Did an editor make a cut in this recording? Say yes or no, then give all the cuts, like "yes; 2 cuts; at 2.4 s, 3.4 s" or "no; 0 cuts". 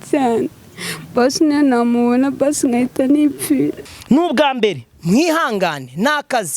yes; 1 cut; at 3.8 s